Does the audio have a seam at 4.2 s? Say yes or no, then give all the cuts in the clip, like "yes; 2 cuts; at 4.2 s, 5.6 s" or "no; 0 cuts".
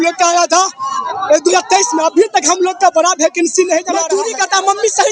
yes; 1 cut; at 4.2 s